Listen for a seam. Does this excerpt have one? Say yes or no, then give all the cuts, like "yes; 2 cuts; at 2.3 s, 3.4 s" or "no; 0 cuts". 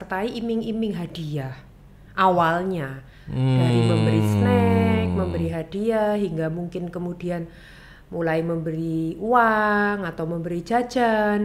no; 0 cuts